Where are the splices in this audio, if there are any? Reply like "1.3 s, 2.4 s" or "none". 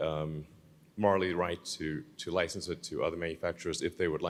none